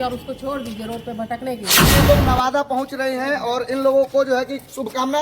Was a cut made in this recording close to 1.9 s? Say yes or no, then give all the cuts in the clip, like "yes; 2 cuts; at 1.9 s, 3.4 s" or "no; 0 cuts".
yes; 1 cut; at 1.9 s